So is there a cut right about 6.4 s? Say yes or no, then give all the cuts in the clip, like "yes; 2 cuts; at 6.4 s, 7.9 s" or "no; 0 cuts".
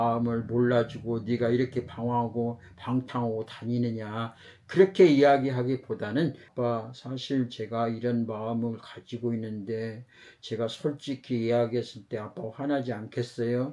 yes; 1 cut; at 6.4 s